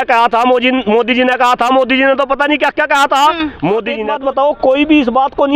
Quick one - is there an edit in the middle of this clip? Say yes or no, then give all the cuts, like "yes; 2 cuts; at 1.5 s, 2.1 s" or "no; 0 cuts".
yes; 1 cut; at 4.0 s